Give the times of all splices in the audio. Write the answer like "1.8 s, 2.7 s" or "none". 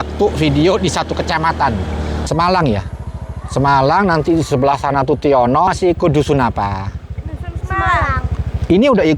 2.3 s, 5.7 s